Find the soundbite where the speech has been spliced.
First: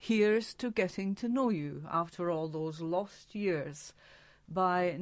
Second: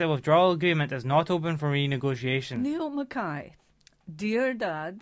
second; 1 cut; at 2.5 s

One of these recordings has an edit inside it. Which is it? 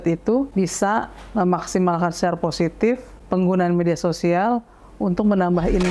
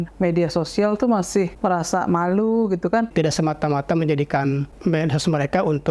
second; 3 cuts; at 1.5 s, 3.1 s, 4.7 s

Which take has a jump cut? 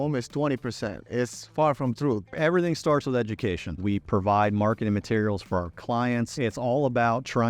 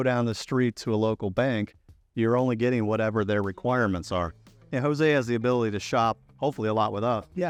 first; 4 cuts; at 1.0 s, 2.3 s, 3.8 s, 6.3 s

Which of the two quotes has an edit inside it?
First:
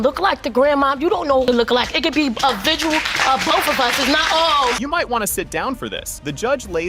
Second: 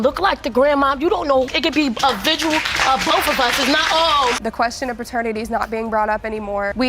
second; 2 cuts; at 1.4 s, 4.4 s

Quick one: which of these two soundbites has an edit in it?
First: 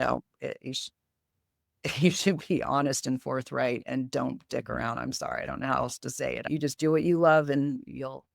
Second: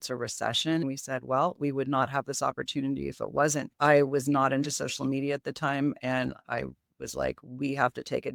first; 1 cut; at 6.5 s

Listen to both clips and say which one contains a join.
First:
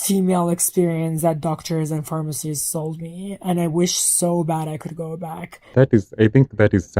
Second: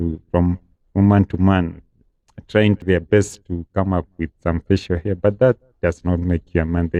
first; 1 cut; at 5.7 s

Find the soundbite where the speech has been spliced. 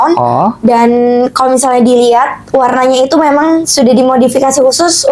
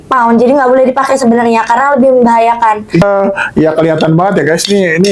second; 1 cut; at 3.0 s

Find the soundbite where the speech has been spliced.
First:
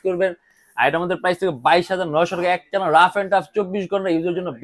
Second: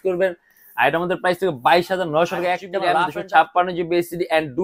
second; 1 cut; at 2.8 s

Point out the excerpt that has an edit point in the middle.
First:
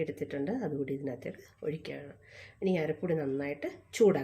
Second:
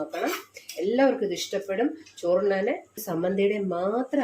second; 1 cut; at 3.0 s

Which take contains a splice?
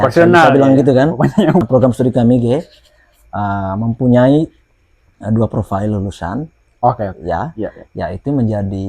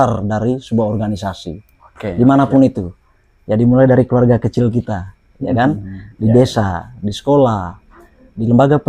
first; 1 cut; at 1.6 s

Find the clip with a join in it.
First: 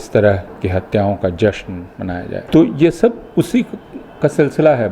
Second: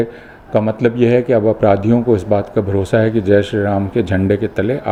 first; 1 cut; at 2.3 s

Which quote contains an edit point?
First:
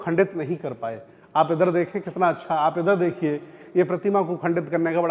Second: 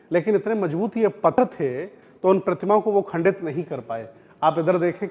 second; 1 cut; at 1.3 s

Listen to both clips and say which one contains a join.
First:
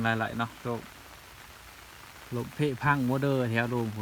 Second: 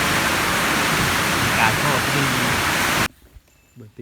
second; 1 cut; at 3.1 s

